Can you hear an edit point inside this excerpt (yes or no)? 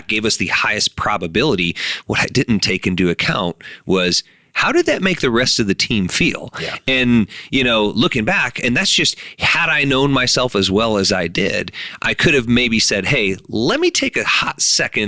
no